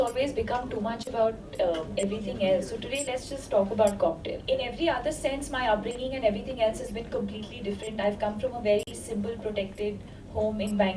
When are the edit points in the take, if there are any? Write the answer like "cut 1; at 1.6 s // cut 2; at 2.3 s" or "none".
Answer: cut 1; at 4.4 s